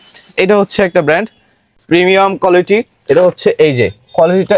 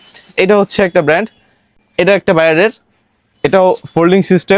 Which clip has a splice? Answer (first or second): first